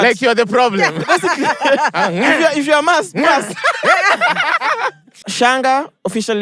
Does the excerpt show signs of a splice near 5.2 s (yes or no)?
yes